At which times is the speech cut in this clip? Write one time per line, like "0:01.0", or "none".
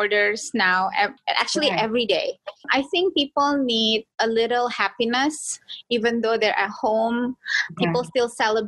0:01.2
0:02.6
0:04.1